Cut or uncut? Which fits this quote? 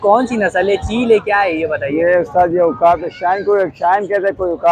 uncut